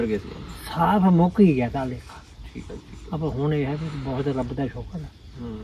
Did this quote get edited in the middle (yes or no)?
no